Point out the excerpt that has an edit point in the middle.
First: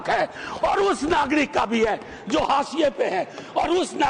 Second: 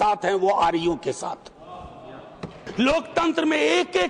second; 1 cut; at 2.6 s

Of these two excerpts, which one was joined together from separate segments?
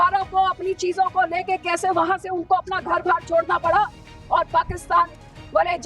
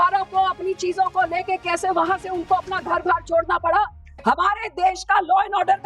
second; 1 cut; at 4.1 s

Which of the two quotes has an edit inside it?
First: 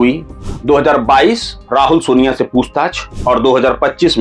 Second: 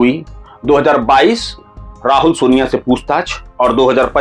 first; 1 cut; at 1.5 s

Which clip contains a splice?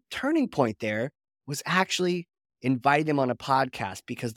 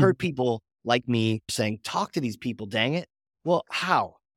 second; 1 cut; at 1.5 s

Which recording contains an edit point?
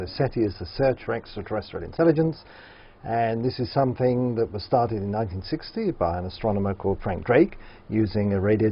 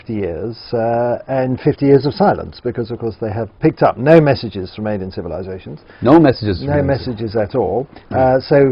first; 1 cut; at 7.5 s

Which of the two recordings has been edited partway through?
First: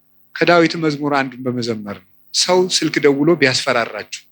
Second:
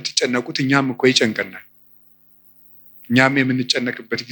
first; 1 cut; at 2.2 s

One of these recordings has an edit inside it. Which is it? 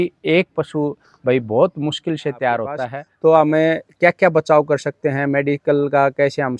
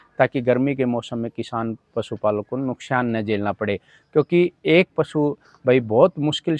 first; 1 cut; at 3.1 s

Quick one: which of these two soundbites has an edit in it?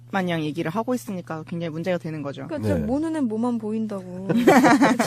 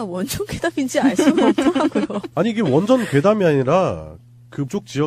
first; 1 cut; at 2.5 s

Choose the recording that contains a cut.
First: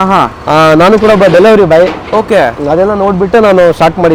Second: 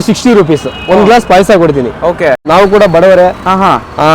second; 1 cut; at 2.5 s

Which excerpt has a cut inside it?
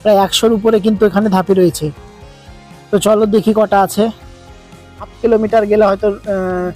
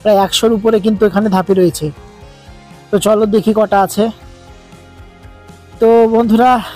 first; 1 cut; at 5.1 s

